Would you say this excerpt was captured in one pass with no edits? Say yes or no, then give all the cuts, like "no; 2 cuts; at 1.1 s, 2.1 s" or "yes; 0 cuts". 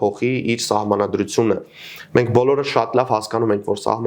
yes; 0 cuts